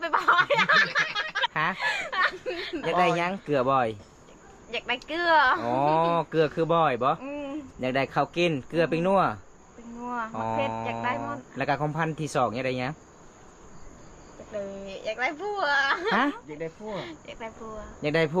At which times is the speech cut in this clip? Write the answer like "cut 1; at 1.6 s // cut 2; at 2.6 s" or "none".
cut 1; at 1.5 s